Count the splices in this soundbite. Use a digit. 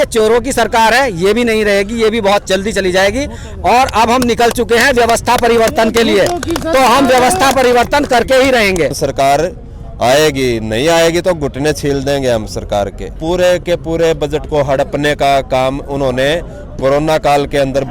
2